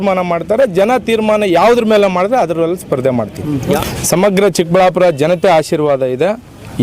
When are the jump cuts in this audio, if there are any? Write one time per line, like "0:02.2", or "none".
0:03.8

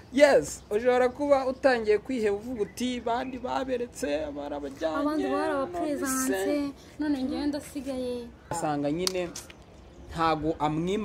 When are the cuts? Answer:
0:08.5

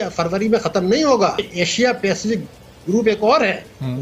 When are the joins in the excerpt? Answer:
0:01.5

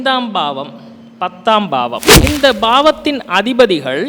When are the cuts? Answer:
0:02.1

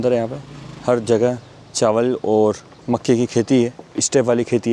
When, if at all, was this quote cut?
none

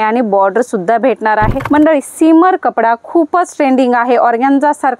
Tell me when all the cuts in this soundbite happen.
0:01.6

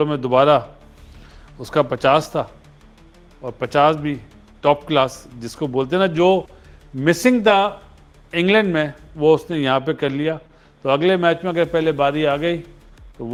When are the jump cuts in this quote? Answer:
none

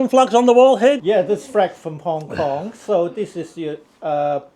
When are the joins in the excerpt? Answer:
0:01.0

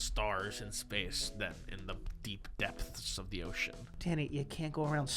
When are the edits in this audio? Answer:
0:03.7

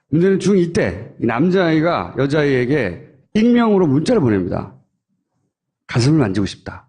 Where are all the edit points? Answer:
0:04.6

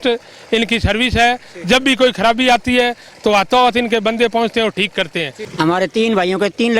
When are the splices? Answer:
0:05.4

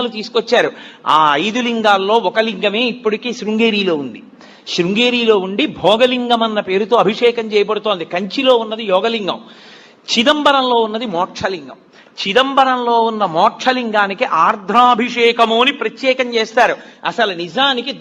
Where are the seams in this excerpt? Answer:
0:13.9

